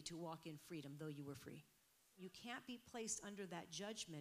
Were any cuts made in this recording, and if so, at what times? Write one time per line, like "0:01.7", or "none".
0:02.2